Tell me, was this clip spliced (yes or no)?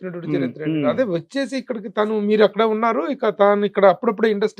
no